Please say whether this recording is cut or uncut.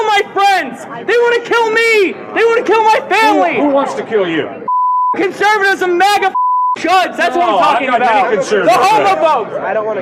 uncut